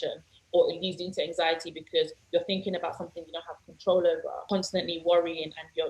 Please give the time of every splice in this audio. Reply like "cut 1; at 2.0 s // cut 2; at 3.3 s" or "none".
cut 1; at 4.4 s